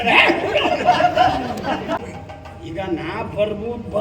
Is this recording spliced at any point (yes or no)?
yes